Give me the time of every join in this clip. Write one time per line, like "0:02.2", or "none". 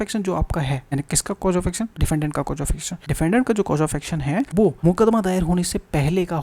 0:00.8
0:02.0
0:02.9
0:04.6